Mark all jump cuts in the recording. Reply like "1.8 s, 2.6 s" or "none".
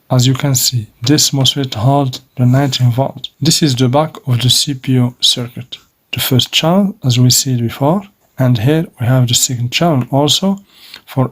0.9 s, 3.3 s, 5.9 s, 8.2 s